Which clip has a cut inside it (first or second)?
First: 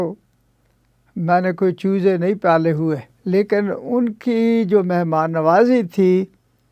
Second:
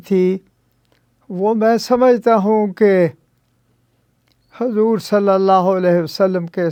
first